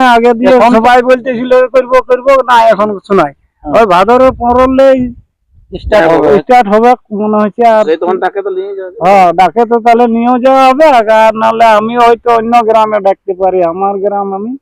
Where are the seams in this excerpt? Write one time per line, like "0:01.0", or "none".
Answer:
none